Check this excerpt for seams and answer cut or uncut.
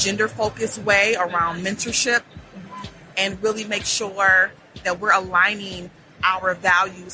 cut